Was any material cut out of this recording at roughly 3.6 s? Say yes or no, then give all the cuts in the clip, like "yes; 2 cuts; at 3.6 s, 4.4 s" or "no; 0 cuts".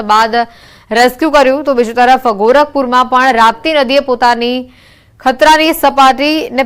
yes; 1 cut; at 3.6 s